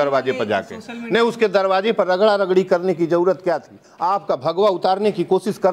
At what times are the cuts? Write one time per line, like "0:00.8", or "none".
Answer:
0:03.9